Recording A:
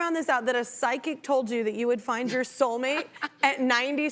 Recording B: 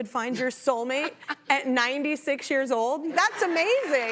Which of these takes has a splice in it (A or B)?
B